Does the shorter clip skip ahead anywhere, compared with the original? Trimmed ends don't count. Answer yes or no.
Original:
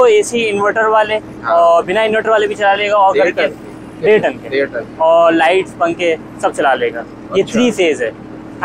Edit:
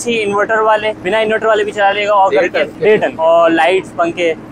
yes